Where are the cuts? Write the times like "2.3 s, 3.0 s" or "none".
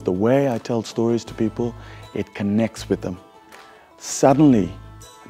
none